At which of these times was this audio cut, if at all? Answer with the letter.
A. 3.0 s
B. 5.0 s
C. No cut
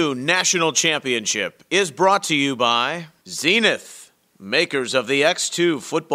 A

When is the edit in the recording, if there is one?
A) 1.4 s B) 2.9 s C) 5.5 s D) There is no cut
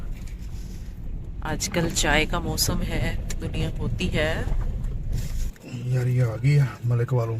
C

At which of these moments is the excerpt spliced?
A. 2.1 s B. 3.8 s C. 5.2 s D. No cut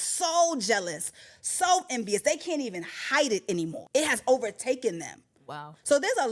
B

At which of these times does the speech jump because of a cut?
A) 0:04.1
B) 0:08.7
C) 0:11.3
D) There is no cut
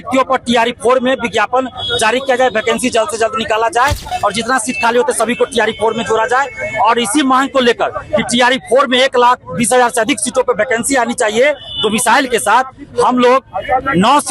A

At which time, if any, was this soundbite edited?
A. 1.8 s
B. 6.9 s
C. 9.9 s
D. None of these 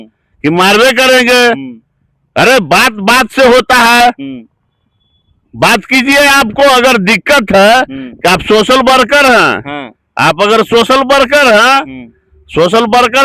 D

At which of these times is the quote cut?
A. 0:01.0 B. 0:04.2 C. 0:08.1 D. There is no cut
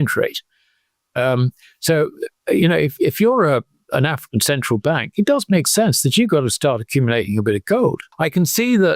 C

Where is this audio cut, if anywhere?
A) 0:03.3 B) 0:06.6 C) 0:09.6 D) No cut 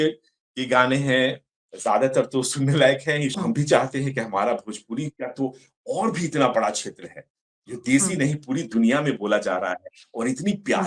A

